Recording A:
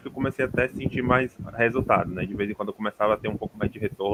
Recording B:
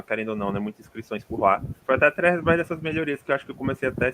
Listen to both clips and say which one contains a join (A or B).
B